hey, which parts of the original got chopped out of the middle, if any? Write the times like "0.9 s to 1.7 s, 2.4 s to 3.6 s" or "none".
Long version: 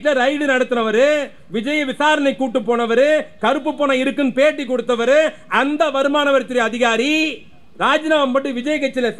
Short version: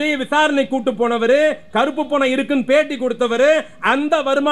none